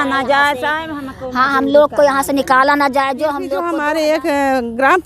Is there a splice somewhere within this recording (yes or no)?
yes